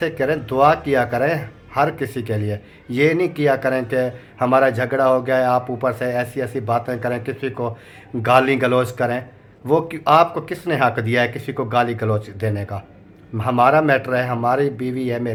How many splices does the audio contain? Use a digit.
0